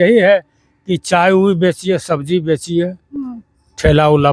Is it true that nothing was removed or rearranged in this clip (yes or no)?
yes